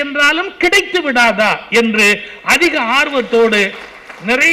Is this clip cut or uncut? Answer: uncut